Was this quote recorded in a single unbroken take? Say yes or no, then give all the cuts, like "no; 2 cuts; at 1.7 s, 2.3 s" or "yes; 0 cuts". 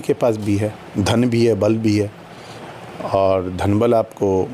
yes; 0 cuts